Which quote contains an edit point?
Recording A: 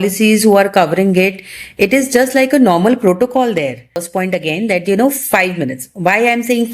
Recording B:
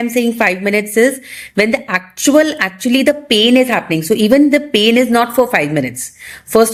A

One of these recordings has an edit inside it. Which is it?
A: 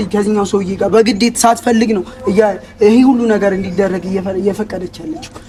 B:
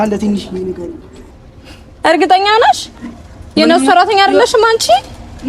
B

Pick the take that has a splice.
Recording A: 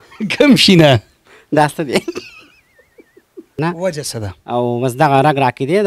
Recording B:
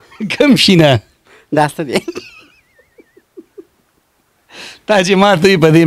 A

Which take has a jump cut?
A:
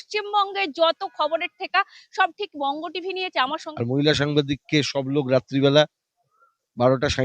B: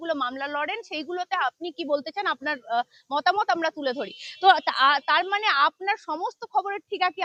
A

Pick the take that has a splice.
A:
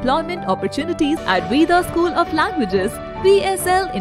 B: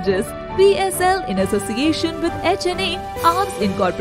A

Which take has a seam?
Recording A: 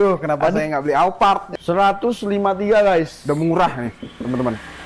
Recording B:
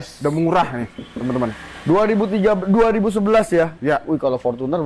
A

